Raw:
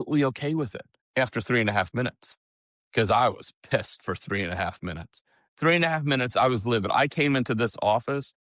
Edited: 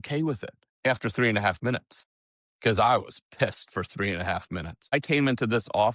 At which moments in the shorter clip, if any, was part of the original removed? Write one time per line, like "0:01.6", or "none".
0:04.9